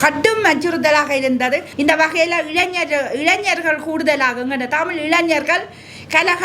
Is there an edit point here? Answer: yes; 1 cut; at 1.7 s

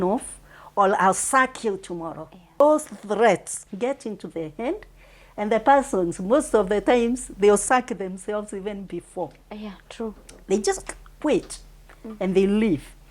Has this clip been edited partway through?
yes; 1 cut; at 2.6 s

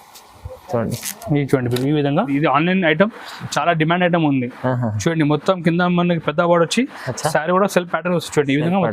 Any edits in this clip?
yes; 1 cut; at 2.3 s

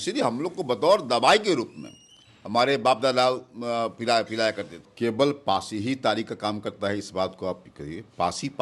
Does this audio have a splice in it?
yes; 1 cut; at 4.8 s

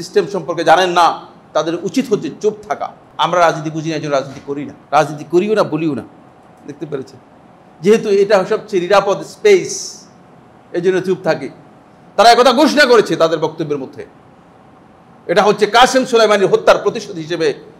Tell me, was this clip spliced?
yes; 2 cuts; at 3.0 s, 4.7 s

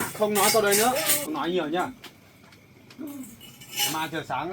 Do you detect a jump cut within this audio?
yes; 1 cut; at 1.1 s

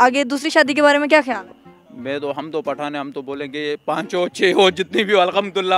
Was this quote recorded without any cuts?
yes; 0 cuts

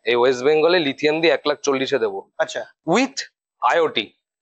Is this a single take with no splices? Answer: yes; 0 cuts

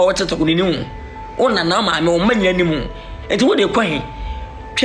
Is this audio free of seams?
yes; 0 cuts

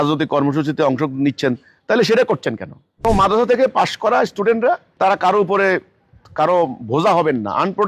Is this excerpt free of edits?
no; 2 cuts; at 3.0 s, 4.9 s

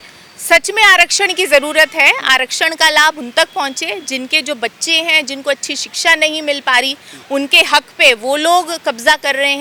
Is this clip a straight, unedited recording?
yes; 0 cuts

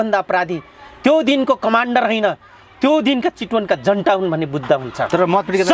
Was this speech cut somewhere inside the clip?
no; 0 cuts

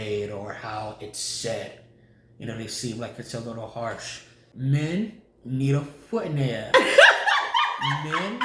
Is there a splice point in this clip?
yes; 1 cut; at 4.4 s

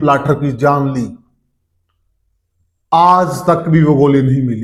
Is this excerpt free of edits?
yes; 0 cuts

